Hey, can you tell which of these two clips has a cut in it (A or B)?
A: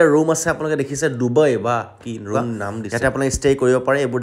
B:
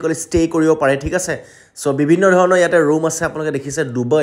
A